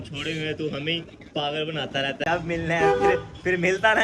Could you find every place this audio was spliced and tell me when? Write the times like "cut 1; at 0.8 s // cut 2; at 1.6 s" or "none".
cut 1; at 2.2 s